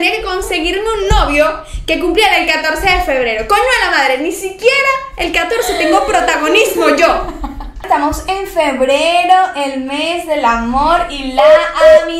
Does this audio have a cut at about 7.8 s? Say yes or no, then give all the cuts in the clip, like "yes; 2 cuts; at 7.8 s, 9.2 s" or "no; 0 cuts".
yes; 1 cut; at 7.8 s